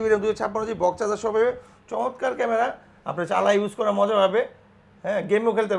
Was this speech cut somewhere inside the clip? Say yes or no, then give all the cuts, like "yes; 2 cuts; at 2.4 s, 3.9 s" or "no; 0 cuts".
no; 0 cuts